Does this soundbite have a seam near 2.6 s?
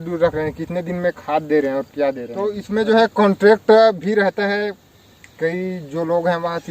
yes; 1 cut; at 2.6 s

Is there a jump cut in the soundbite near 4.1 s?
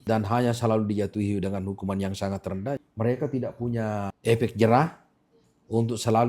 yes; 2 cuts; at 2.8 s, 4.1 s

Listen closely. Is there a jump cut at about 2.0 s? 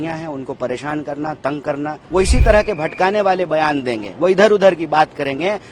yes; 1 cut; at 2.0 s

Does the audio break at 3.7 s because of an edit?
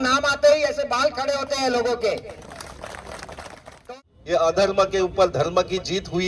yes; 1 cut; at 3.7 s

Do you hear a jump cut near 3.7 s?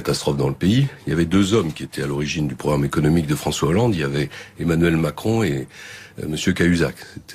yes; 1 cut; at 3.7 s

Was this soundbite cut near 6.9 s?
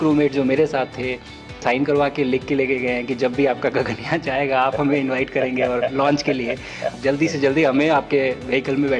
yes; 2 cuts; at 1.6 s, 6.9 s

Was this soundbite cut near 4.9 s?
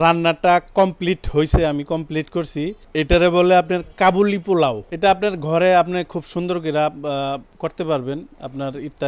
yes; 2 cuts; at 2.8 s, 4.9 s

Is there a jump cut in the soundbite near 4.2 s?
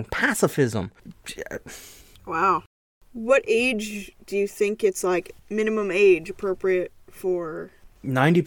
no; 1 cut; at 2.9 s

